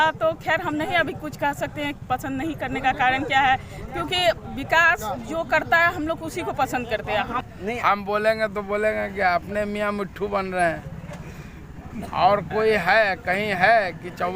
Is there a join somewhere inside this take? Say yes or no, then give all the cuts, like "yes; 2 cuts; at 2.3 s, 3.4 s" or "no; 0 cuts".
yes; 1 cut; at 7.4 s